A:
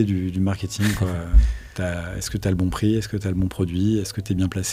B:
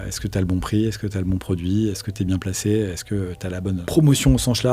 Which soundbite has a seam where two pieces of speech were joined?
B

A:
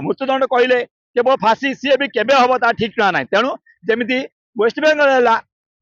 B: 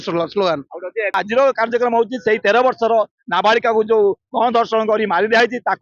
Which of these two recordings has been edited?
B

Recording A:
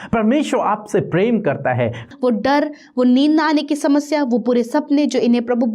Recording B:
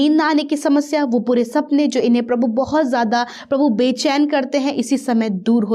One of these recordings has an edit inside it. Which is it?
A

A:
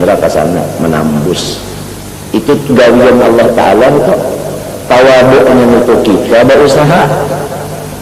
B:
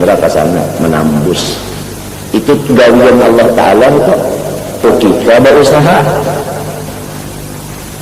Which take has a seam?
B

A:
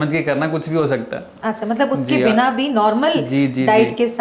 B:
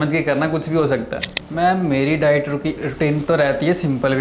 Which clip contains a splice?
B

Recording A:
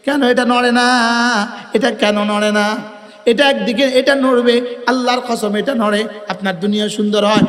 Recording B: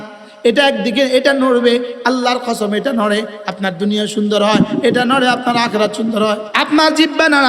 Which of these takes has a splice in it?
B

